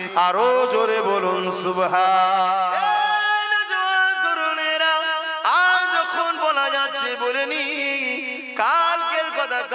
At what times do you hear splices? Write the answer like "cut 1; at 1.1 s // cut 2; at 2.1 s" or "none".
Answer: cut 1; at 2.8 s

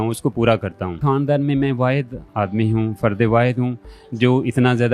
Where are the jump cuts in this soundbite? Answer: cut 1; at 1.0 s

